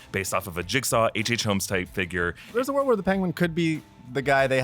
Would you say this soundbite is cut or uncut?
cut